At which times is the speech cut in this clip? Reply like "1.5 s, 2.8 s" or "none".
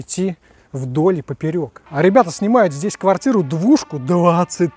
1.8 s